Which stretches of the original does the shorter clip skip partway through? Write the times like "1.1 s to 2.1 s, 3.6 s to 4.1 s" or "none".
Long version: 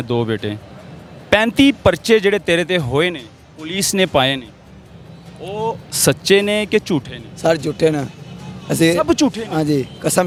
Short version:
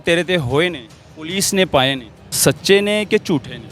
4.7 s to 5.9 s